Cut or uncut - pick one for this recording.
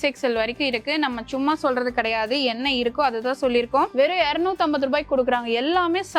cut